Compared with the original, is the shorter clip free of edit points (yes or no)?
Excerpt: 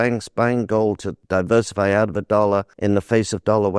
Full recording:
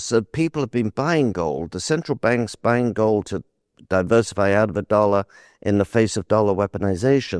no